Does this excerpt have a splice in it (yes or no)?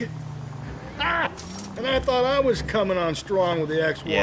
no